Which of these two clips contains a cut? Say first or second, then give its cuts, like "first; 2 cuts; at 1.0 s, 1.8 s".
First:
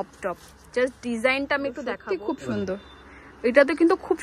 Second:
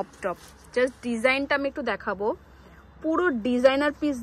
first; 1 cut; at 2.0 s